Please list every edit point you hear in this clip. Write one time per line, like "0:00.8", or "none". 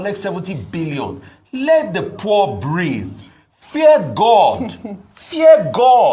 none